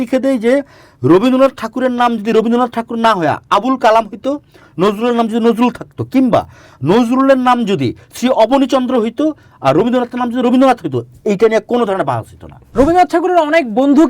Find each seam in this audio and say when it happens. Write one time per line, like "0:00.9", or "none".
0:12.6